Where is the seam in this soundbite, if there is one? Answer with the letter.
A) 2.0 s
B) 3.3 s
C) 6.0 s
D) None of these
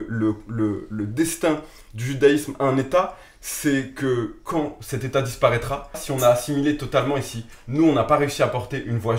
C